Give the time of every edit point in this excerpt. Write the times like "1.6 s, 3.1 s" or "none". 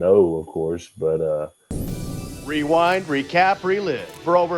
1.7 s